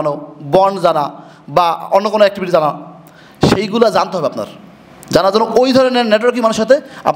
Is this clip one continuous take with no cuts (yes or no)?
yes